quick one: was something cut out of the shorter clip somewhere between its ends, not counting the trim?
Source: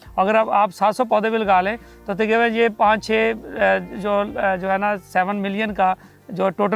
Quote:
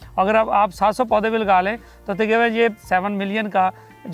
yes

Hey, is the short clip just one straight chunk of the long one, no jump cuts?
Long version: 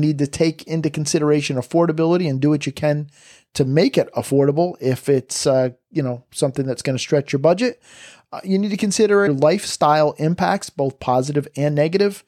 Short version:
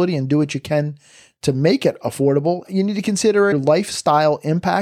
no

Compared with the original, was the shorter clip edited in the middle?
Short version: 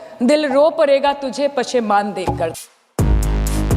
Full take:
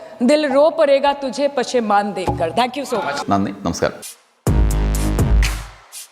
yes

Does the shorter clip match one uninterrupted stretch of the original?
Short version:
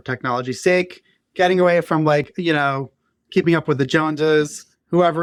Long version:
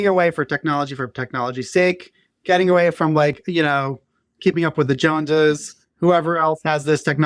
yes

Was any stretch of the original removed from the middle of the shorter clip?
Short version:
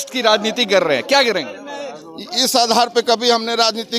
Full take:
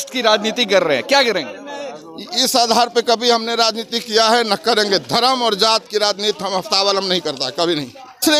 no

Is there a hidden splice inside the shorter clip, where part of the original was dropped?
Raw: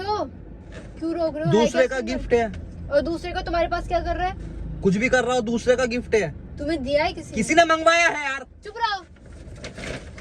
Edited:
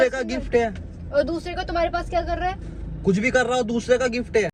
no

